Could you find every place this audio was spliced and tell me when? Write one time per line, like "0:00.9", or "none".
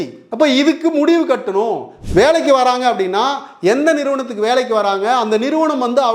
0:01.9

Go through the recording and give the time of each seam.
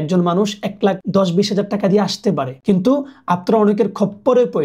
0:01.0
0:02.5

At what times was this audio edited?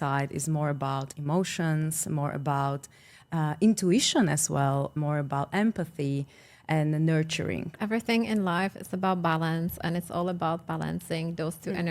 0:07.7

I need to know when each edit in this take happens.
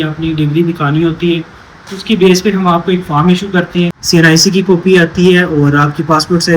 0:04.0

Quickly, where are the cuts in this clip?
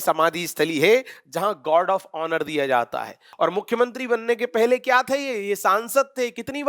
0:03.2

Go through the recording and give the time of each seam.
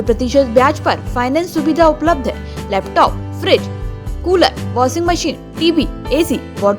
none

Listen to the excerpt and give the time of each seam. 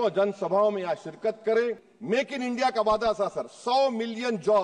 0:01.9

